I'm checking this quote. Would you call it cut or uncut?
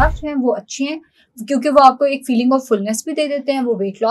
uncut